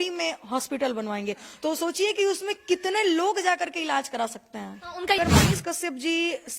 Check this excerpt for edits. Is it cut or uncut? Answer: cut